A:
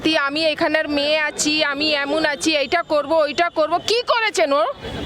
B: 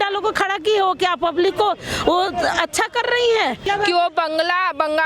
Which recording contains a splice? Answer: B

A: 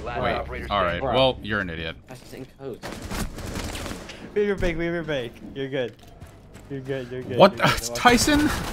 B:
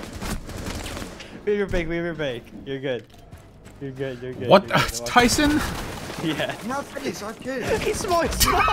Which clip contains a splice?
A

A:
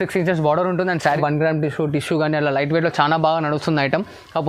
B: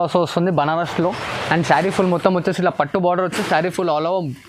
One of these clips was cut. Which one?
A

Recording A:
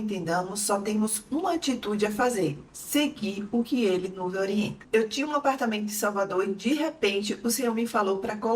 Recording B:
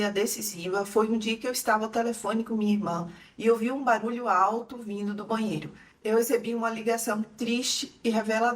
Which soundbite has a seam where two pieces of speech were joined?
B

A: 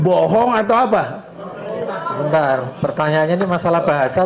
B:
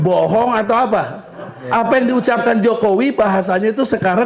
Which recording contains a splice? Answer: B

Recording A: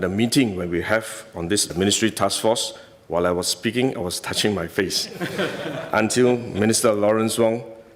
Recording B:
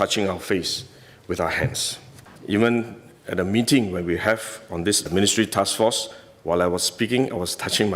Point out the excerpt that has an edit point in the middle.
B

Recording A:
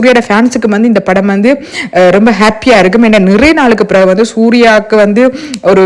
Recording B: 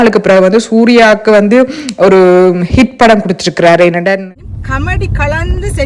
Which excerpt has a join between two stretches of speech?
B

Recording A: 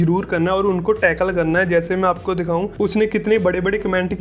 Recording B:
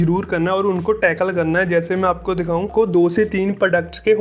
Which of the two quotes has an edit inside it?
B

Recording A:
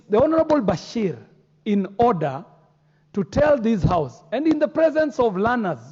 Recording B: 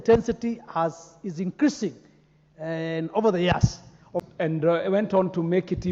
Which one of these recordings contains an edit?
B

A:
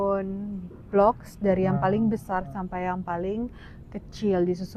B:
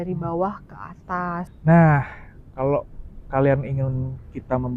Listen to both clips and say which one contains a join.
B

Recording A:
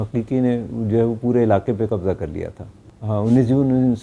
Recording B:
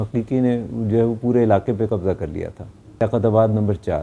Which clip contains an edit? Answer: A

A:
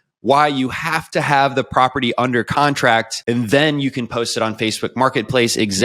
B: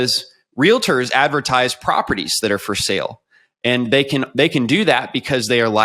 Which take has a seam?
A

